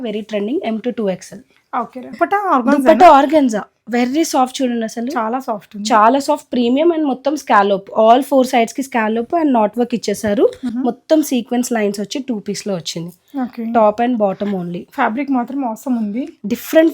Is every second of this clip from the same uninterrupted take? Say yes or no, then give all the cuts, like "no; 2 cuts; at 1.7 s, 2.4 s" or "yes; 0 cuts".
no; 2 cuts; at 2.2 s, 10.7 s